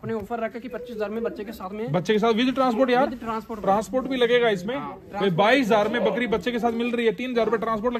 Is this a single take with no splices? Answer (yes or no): yes